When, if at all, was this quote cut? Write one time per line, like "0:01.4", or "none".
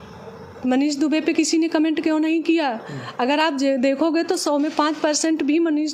none

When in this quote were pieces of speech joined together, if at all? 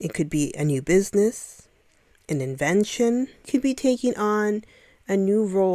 0:03.5

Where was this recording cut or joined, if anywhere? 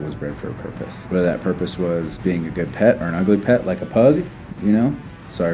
0:01.0

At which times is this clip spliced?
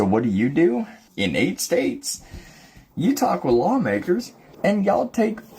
0:01.0
0:04.4

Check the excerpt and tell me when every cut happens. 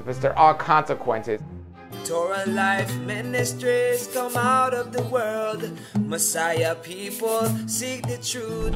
0:01.9

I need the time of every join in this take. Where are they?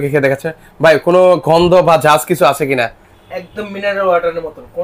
none

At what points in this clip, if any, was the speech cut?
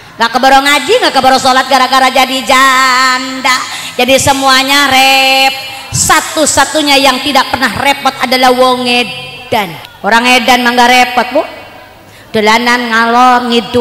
0:09.8

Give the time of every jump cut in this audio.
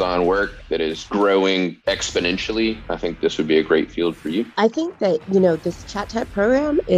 0:01.0
0:01.8
0:04.5

